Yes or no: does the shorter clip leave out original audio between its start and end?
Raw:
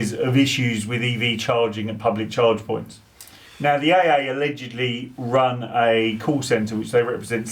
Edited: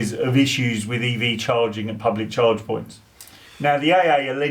no